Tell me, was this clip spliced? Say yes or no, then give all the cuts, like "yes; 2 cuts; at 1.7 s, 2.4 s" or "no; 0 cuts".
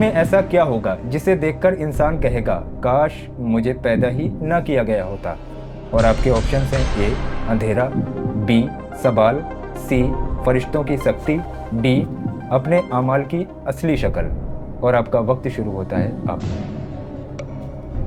no; 0 cuts